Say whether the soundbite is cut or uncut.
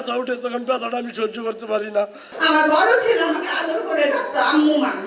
cut